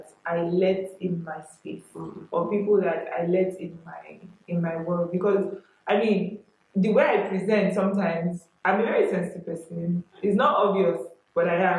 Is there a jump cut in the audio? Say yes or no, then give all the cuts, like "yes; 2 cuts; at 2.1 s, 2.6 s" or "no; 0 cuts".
no; 0 cuts